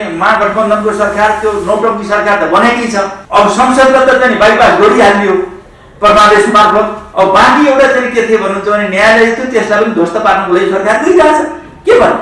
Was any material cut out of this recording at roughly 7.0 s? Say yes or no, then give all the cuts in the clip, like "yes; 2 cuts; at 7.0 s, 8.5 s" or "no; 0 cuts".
yes; 2 cuts; at 3.2 s, 7.0 s